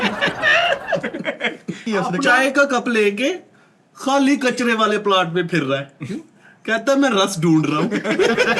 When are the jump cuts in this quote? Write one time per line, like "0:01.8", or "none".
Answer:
0:01.8